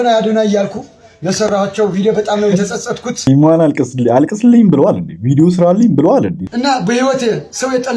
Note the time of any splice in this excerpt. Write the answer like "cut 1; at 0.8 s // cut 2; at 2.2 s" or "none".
cut 1; at 3.3 s // cut 2; at 6.5 s

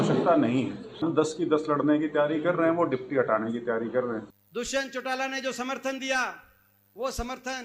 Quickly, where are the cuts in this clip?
cut 1; at 1.0 s // cut 2; at 4.4 s

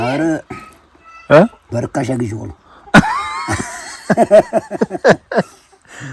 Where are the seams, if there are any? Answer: none

